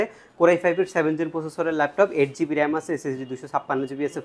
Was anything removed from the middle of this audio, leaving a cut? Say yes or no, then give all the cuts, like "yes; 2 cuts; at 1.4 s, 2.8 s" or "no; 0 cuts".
no; 0 cuts